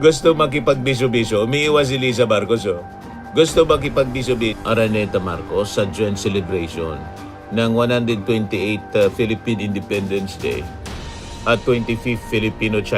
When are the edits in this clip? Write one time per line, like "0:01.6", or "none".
0:04.6